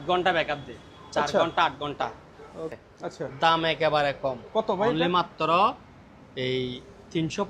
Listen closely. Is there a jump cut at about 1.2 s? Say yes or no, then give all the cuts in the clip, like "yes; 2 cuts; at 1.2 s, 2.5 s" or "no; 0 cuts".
no; 1 cut; at 2.7 s